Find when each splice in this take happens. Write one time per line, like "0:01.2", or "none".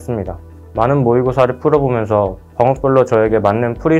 none